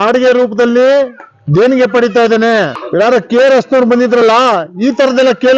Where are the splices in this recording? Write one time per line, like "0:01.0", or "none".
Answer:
0:02.8